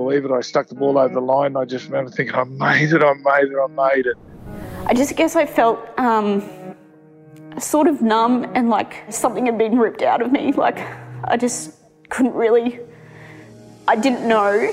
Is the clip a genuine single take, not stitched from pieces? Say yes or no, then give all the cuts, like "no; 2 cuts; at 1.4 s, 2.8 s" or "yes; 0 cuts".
no; 2 cuts; at 4.5 s, 9.1 s